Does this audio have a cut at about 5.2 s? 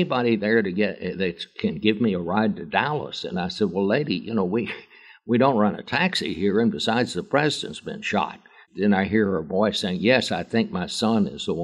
no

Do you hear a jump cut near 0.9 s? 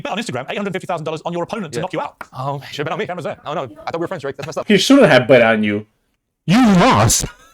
no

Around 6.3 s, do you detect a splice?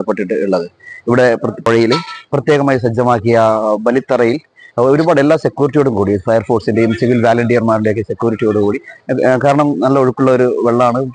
no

